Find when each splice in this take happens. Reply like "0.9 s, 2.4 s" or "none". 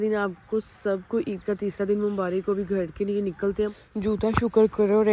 3.7 s